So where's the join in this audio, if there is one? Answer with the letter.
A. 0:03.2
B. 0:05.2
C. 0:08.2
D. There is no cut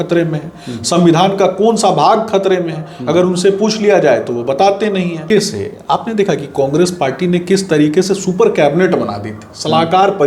B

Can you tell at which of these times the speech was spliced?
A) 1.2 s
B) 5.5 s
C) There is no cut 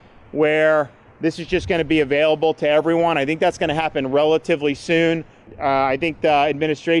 B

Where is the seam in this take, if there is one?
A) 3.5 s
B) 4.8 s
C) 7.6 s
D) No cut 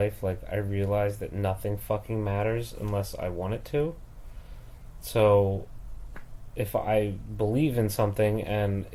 D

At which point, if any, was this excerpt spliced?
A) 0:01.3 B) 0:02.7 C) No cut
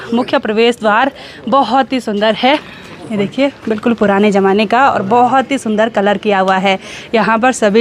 C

